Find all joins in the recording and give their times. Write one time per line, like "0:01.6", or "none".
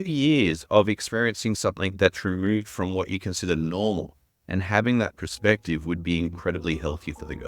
none